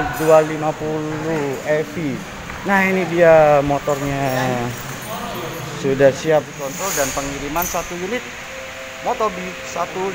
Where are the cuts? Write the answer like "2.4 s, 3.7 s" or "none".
6.6 s